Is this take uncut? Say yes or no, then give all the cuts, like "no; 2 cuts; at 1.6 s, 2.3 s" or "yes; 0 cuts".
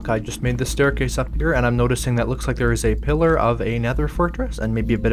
yes; 0 cuts